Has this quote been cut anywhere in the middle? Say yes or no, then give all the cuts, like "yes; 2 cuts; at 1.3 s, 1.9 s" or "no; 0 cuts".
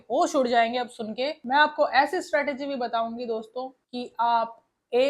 yes; 1 cut; at 1.4 s